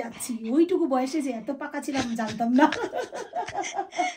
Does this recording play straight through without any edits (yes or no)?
yes